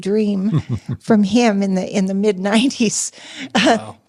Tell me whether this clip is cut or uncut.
uncut